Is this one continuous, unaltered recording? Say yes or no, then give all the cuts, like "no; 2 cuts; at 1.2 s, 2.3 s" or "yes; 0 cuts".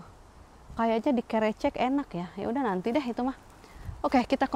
yes; 0 cuts